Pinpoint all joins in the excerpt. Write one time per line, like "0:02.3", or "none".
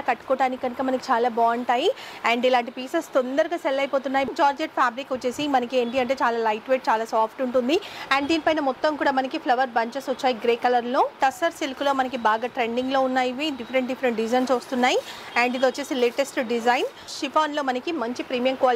0:04.3
0:11.2
0:17.1